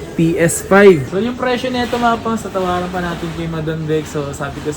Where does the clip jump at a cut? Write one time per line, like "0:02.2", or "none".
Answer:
0:01.0